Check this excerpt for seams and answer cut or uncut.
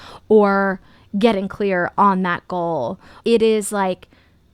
cut